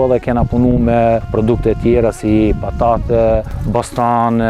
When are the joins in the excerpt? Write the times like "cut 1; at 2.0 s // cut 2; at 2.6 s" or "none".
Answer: cut 1; at 1.3 s // cut 2; at 3.6 s